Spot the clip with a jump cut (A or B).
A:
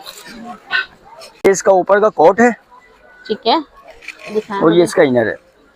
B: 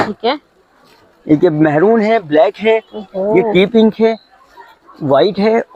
A